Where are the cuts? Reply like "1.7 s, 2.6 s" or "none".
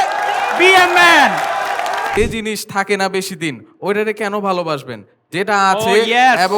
2.2 s